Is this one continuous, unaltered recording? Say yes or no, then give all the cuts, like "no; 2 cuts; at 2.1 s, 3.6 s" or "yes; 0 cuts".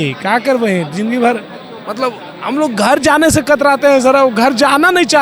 yes; 0 cuts